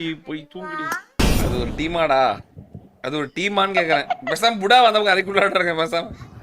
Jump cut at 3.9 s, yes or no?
no